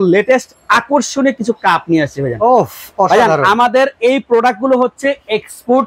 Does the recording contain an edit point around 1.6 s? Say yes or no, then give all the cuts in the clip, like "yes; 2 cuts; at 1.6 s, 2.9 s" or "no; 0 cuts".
no; 0 cuts